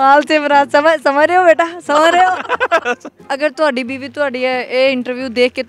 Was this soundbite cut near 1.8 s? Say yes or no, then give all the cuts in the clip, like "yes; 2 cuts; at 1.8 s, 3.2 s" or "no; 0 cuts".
no; 1 cut; at 3.1 s